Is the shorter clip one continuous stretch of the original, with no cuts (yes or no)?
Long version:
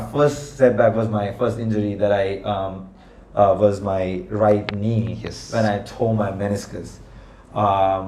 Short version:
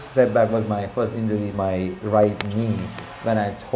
no